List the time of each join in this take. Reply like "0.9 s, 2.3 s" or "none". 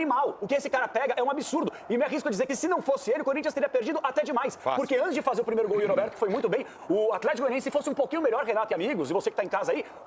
none